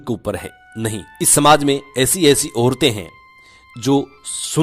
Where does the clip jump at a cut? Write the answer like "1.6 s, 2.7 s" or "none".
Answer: 1.2 s